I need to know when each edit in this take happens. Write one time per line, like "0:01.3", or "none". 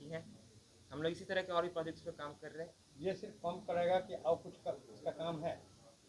none